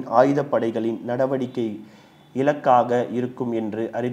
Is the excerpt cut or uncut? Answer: uncut